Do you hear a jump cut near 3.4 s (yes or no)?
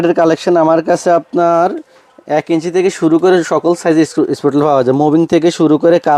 no